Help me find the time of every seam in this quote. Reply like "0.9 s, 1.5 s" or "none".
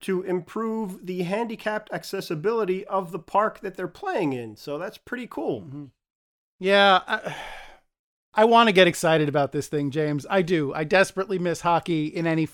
none